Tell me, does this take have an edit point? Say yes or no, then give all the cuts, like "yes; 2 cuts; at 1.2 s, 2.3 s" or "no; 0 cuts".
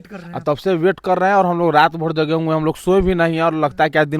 no; 0 cuts